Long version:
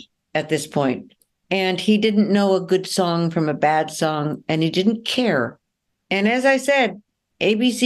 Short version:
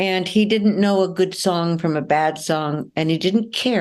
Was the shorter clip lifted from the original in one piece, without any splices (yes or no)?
yes